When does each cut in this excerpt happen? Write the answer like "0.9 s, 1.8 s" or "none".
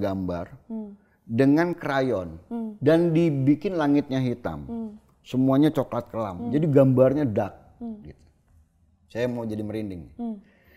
none